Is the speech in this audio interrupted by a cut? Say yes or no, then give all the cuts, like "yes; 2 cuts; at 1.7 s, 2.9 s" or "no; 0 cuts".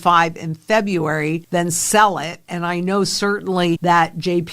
yes; 2 cuts; at 1.4 s, 3.8 s